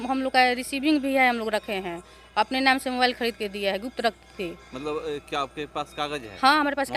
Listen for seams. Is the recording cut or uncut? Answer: uncut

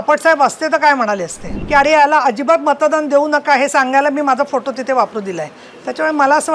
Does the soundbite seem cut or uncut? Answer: cut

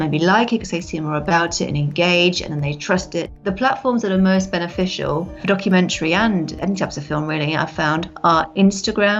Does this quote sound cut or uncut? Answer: cut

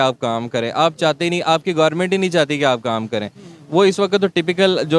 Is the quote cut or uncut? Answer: uncut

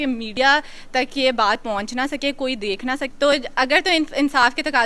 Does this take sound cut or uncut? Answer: cut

